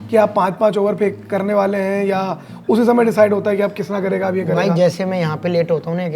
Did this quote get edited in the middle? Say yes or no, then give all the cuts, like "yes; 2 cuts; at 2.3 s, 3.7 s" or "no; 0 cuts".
no; 0 cuts